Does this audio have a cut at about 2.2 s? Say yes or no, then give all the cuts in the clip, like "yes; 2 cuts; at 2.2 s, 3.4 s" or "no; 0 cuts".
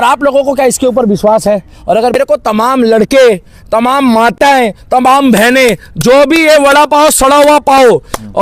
yes; 1 cut; at 2.2 s